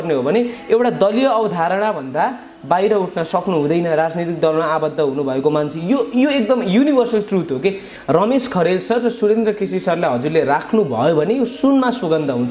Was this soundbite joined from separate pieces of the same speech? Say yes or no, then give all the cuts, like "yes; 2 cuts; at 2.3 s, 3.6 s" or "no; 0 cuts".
yes; 1 cut; at 7.9 s